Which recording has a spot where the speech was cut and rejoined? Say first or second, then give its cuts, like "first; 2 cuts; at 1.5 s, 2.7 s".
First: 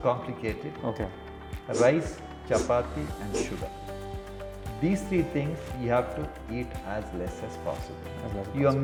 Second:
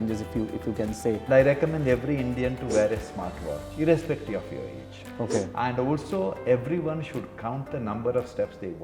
second; 2 cuts; at 1.2 s, 5.0 s